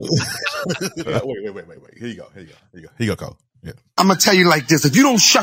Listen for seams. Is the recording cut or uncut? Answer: cut